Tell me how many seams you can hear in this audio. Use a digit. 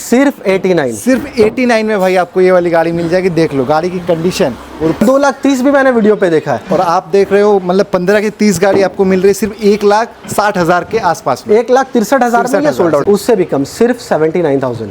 2